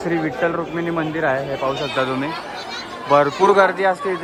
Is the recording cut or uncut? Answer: uncut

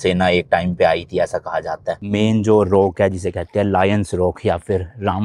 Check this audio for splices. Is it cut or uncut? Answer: cut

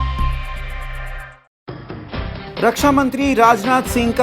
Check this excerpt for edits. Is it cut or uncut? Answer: cut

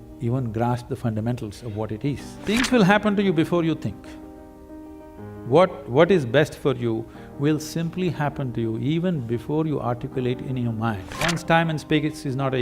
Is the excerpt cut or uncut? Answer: cut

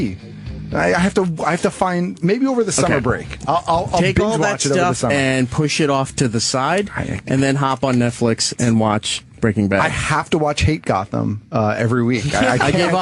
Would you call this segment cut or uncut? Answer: cut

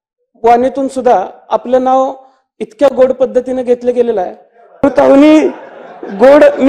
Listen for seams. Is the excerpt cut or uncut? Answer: cut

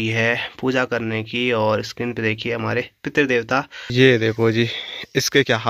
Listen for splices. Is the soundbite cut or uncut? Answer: cut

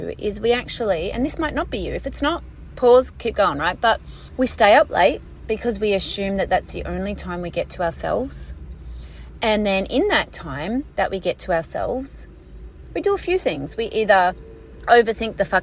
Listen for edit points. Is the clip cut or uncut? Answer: cut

